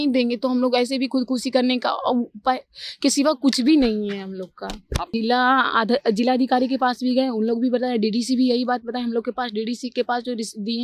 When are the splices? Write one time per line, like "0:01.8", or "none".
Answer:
0:05.1